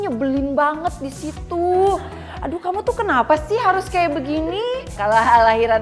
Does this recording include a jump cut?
yes; 1 cut; at 4.9 s

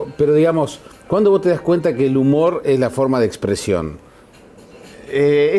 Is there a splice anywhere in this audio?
yes; 1 cut; at 3.1 s

